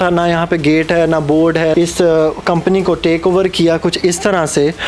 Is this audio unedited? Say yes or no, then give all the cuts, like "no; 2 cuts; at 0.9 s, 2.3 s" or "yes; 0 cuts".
no; 1 cut; at 1.7 s